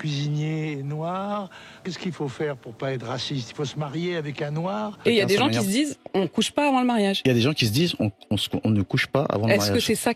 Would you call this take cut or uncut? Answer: cut